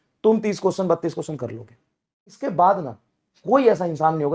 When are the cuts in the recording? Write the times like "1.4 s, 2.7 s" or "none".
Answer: 2.4 s